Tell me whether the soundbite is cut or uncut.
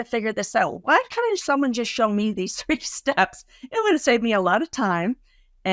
uncut